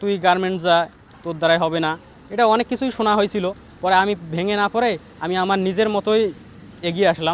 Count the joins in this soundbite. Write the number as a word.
one